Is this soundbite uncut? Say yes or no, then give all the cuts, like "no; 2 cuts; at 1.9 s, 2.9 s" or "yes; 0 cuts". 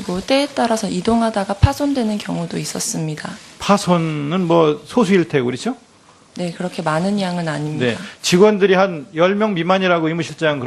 no; 1 cut; at 6.6 s